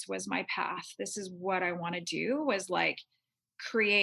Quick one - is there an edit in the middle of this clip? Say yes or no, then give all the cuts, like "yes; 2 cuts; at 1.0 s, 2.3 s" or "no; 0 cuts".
no; 0 cuts